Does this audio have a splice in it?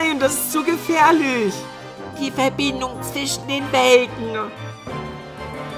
no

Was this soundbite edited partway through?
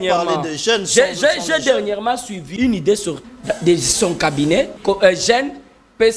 yes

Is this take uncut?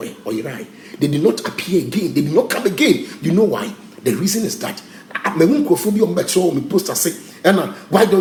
yes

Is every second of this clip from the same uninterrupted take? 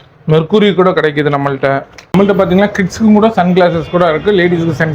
no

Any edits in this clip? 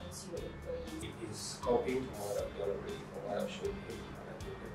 yes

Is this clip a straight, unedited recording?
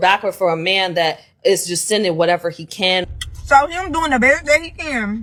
yes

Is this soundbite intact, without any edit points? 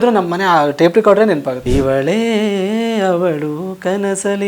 no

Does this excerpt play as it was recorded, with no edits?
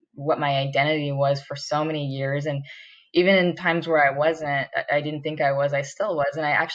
yes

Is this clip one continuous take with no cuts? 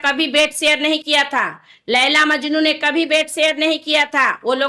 yes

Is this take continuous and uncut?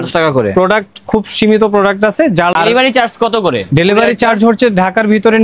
yes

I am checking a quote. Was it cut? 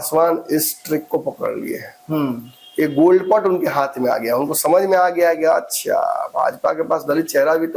no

